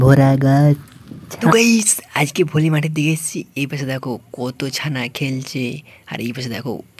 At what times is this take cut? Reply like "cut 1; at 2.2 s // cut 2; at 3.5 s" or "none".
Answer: cut 1; at 1.5 s